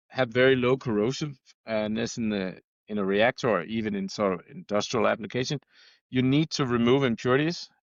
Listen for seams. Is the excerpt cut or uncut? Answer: uncut